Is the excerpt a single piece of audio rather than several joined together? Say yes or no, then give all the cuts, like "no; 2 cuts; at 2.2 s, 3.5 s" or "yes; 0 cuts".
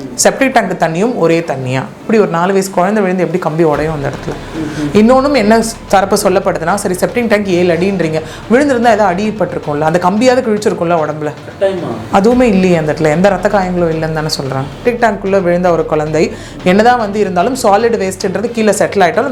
no; 2 cuts; at 2.0 s, 14.8 s